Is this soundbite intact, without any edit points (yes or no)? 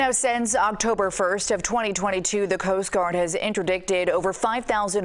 yes